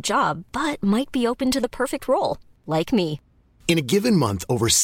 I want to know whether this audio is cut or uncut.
uncut